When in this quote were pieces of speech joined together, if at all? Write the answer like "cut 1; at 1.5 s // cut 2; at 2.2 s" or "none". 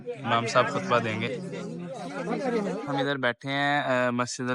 cut 1; at 2.9 s